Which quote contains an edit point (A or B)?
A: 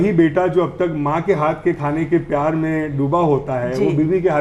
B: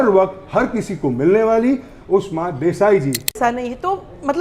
B